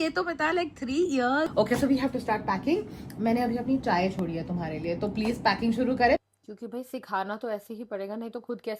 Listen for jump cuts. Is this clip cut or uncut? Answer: cut